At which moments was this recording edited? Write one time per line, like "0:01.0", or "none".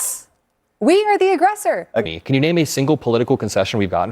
0:02.0